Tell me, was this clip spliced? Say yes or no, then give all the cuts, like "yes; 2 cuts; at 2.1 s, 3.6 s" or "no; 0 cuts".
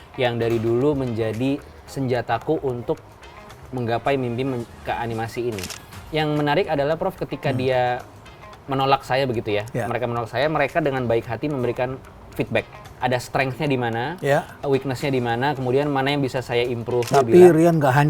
yes; 3 cuts; at 5.7 s, 13.0 s, 17.1 s